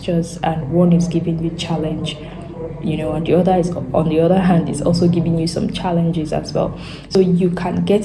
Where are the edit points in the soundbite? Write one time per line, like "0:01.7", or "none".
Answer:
0:07.2